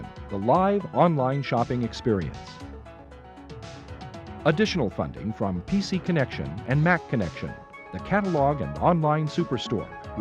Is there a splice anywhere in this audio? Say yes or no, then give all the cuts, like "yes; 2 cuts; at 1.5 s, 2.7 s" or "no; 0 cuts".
yes; 2 cuts; at 2.3 s, 4.3 s